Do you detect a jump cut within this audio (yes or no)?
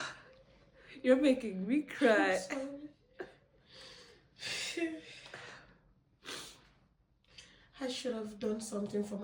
no